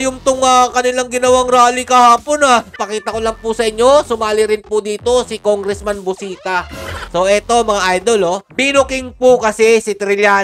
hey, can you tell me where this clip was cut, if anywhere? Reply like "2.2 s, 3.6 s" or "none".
2.8 s, 7.0 s